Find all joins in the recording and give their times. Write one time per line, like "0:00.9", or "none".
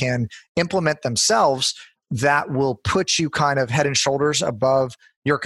none